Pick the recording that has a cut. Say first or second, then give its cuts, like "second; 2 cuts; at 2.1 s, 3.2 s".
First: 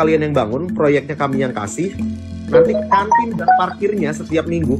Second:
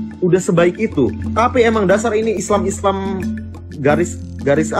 second; 1 cut; at 1.2 s